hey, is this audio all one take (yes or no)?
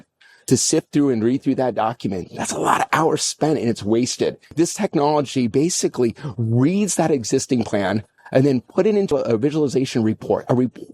no